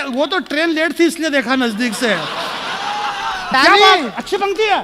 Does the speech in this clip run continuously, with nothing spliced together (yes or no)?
no